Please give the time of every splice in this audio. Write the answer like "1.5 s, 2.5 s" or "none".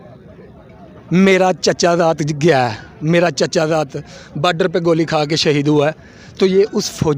none